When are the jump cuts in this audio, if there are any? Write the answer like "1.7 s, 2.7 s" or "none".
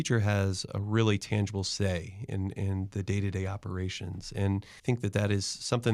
4.7 s